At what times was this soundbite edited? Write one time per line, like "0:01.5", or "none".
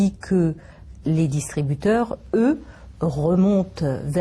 0:00.9